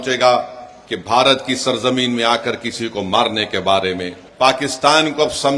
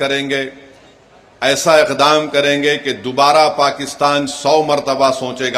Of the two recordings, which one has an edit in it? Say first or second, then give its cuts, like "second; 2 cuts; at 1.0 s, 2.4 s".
first; 1 cut; at 4.2 s